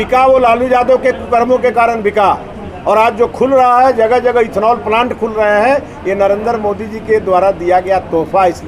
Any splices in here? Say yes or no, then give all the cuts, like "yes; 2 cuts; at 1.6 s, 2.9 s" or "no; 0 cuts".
no; 0 cuts